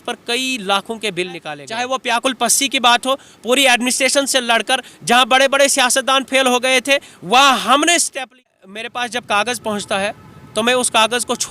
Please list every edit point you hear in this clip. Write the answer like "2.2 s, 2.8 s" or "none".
1.6 s, 8.3 s